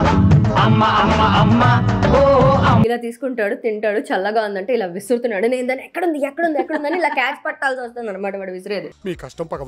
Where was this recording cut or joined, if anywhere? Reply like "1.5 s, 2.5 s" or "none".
2.9 s